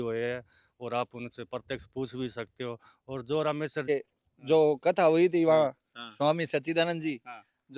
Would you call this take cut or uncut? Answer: cut